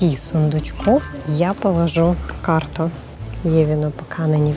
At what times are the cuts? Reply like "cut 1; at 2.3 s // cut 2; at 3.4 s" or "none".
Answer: none

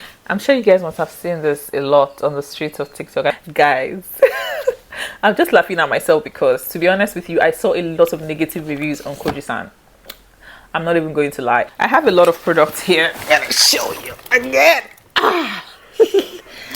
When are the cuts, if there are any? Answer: cut 1; at 3.3 s // cut 2; at 11.7 s

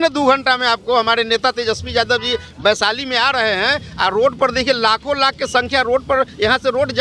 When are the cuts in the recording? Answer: none

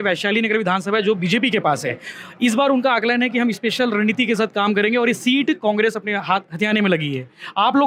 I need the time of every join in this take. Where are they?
none

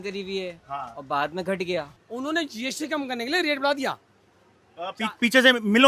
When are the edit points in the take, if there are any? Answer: cut 1; at 2.0 s

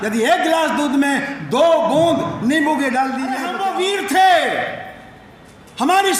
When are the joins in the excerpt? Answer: cut 1; at 3.5 s

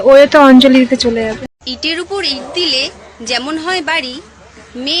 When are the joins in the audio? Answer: cut 1; at 1.6 s

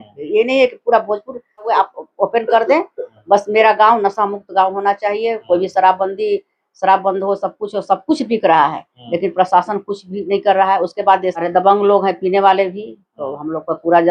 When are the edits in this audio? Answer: cut 1; at 1.7 s // cut 2; at 11.5 s

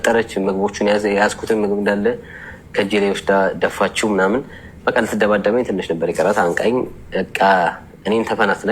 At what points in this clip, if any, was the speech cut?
none

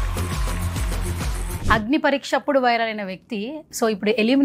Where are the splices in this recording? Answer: cut 1; at 1.6 s

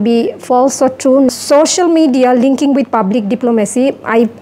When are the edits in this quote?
cut 1; at 1.3 s

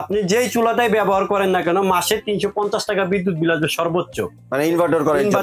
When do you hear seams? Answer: none

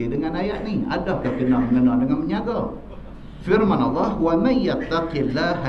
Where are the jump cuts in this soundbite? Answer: none

